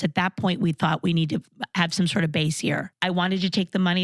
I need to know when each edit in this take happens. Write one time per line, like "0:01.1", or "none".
0:01.6
0:02.9